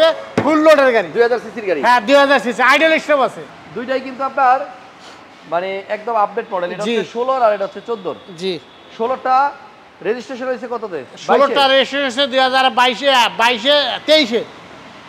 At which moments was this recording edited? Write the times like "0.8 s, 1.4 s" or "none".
3.4 s